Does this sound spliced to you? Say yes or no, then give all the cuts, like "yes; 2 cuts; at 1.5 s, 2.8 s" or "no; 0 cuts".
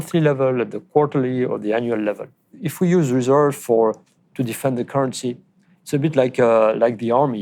yes; 1 cut; at 2.6 s